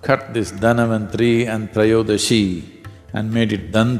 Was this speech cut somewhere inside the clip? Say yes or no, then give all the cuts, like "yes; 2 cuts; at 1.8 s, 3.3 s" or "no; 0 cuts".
no; 0 cuts